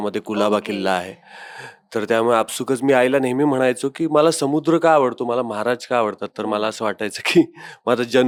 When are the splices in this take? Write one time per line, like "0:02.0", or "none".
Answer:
none